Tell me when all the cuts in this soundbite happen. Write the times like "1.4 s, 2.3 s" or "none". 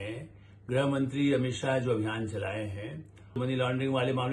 3.4 s